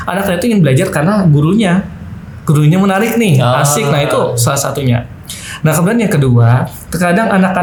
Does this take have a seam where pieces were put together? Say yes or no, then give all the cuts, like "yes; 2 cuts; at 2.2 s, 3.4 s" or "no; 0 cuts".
no; 0 cuts